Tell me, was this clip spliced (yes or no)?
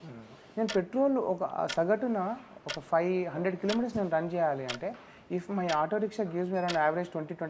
no